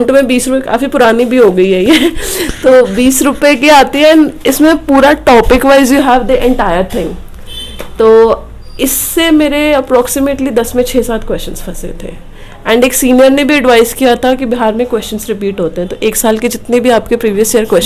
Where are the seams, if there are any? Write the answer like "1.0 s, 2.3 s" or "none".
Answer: none